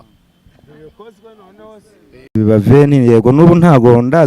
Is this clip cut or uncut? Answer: cut